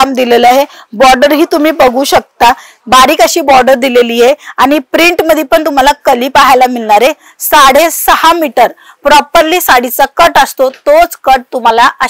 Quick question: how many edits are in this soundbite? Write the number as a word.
zero